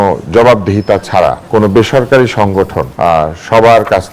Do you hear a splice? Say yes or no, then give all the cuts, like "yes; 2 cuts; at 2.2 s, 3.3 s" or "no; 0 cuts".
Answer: yes; 2 cuts; at 0.8 s, 2.8 s